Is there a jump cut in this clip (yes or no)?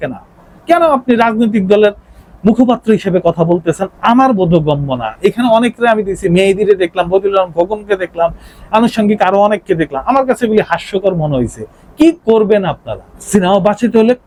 no